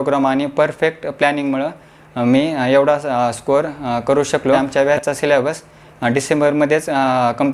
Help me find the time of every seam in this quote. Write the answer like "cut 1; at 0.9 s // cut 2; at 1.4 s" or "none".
cut 1; at 4.6 s